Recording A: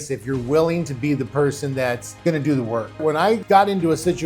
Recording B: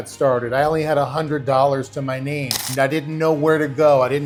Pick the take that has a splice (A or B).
A